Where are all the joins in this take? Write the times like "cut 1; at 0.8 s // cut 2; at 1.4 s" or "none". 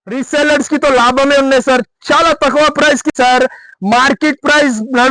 cut 1; at 3.1 s